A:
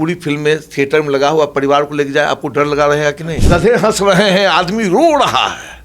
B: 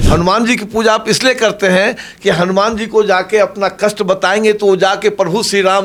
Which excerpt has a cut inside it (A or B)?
A